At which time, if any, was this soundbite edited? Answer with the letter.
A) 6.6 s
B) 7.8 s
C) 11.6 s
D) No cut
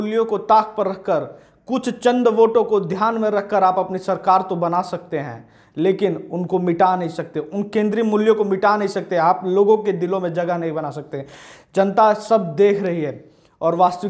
D